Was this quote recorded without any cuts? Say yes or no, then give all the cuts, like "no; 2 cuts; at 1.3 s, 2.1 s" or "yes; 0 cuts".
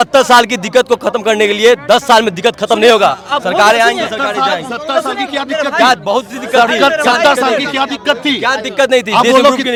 yes; 0 cuts